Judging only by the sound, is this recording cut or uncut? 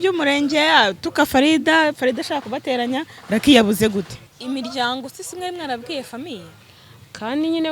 cut